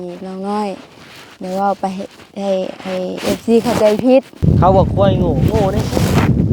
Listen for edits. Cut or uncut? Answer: cut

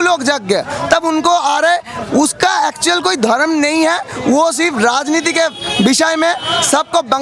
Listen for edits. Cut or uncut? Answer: uncut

